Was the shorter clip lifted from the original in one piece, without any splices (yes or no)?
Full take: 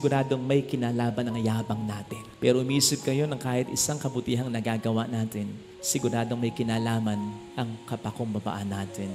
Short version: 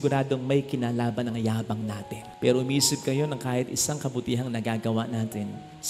yes